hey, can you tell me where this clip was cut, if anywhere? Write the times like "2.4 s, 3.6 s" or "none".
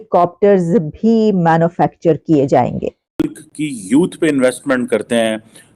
3.4 s